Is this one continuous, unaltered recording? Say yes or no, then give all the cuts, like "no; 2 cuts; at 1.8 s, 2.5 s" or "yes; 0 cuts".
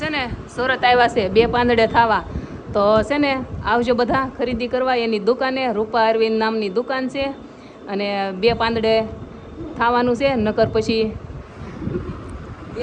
yes; 0 cuts